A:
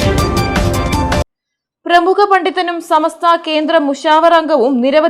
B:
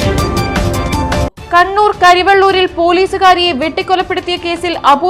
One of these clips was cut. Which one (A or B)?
B